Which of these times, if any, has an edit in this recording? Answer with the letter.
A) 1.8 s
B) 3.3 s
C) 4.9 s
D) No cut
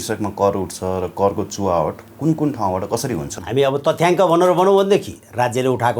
B